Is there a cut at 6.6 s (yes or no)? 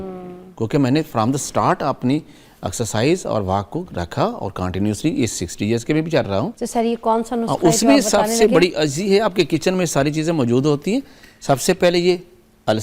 yes